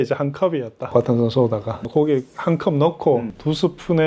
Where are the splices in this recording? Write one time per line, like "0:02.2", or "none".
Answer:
0:01.9